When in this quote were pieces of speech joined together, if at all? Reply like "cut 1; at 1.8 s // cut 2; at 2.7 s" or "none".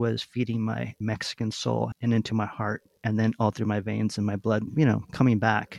cut 1; at 2.0 s // cut 2; at 2.9 s